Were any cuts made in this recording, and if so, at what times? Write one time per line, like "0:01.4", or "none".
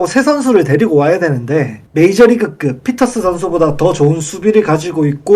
0:01.8